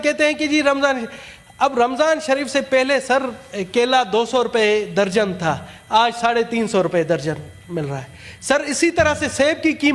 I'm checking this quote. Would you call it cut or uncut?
uncut